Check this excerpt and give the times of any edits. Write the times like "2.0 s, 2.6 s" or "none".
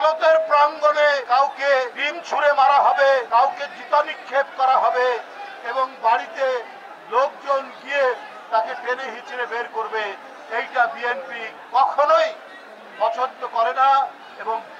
none